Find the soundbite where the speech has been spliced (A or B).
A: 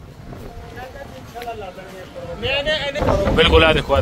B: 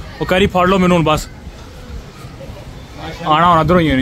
A